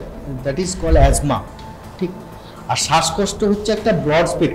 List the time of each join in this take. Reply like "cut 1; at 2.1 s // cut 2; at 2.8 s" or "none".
none